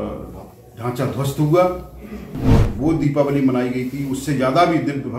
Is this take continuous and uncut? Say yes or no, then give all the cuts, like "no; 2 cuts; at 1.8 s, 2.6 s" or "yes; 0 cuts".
no; 1 cut; at 2.7 s